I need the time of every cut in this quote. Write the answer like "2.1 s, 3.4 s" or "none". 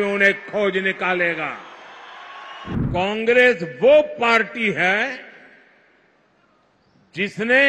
2.8 s